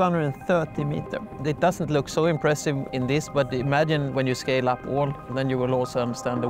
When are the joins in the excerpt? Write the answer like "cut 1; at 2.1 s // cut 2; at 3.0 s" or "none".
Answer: cut 1; at 1.3 s // cut 2; at 2.9 s // cut 3; at 4.1 s